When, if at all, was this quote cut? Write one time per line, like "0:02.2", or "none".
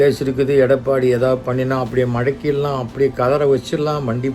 none